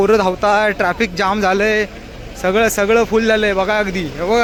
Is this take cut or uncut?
uncut